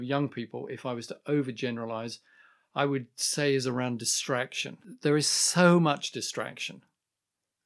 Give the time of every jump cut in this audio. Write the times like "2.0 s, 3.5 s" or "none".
4.9 s